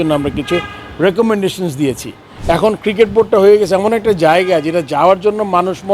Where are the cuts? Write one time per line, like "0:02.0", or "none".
0:02.3